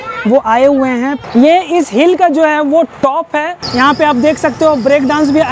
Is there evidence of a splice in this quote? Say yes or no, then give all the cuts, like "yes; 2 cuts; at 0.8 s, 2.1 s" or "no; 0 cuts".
yes; 2 cuts; at 1.2 s, 3.6 s